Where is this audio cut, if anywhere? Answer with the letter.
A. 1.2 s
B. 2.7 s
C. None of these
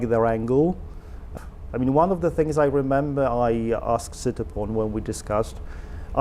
A